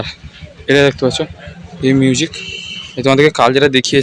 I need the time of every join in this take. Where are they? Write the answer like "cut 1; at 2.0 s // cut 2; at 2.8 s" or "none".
none

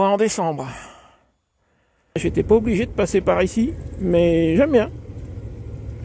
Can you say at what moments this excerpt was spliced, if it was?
cut 1; at 2.2 s

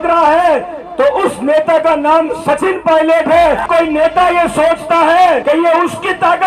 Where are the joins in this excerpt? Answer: cut 1; at 3.6 s // cut 2; at 5.4 s

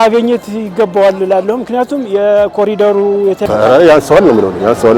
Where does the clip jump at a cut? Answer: cut 1; at 3.4 s

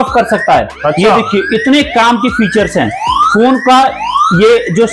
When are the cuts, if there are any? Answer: none

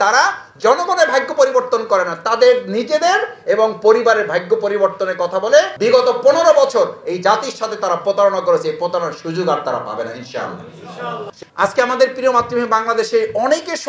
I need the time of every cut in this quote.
cut 1; at 11.3 s

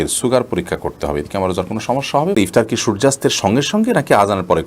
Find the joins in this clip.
cut 1; at 2.4 s

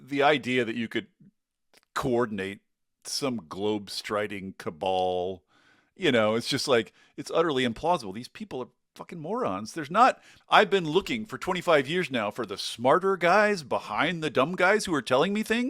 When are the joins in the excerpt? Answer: cut 1; at 10.3 s

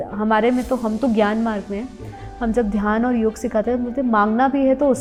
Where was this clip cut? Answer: none

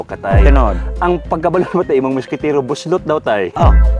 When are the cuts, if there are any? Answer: none

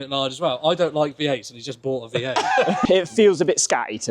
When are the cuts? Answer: cut 1; at 2.8 s

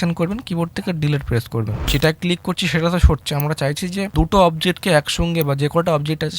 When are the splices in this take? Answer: cut 1; at 1.8 s // cut 2; at 4.1 s

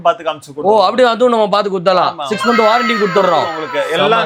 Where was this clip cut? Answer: none

